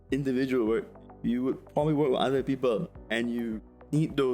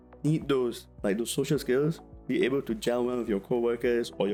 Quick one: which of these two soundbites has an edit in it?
first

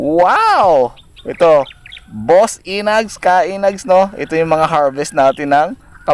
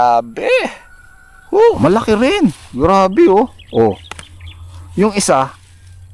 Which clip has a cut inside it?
second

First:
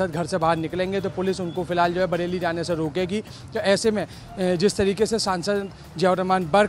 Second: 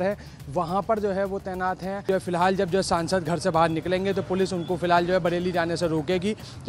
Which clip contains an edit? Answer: second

